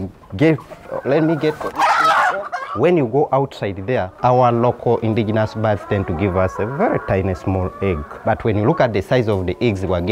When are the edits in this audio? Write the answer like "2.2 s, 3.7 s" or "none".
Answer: 2.6 s, 4.1 s, 8.1 s